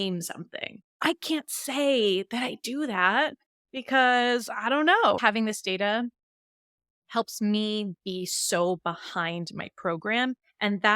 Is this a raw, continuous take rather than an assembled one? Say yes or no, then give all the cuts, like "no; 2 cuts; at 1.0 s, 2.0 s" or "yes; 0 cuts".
no; 1 cut; at 5.2 s